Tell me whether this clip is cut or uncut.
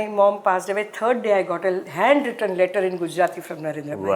uncut